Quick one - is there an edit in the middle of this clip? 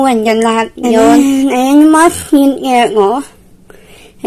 yes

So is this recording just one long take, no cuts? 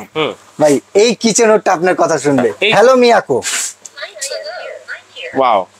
no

